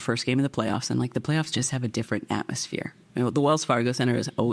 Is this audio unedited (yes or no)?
yes